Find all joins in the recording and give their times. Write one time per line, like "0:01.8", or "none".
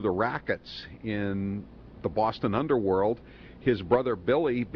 none